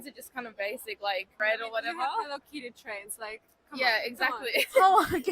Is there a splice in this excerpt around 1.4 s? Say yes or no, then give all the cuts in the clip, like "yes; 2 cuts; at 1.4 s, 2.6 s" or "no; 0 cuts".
yes; 1 cut; at 1.4 s